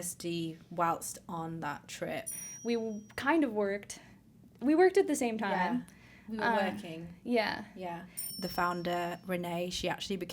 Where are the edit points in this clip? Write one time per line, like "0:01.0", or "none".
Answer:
0:02.4
0:08.3